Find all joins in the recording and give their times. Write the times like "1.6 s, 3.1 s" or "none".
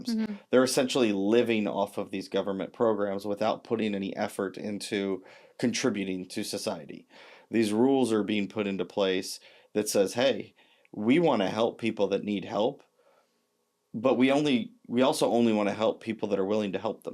none